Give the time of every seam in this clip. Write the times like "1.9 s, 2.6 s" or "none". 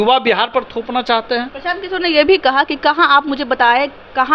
1.5 s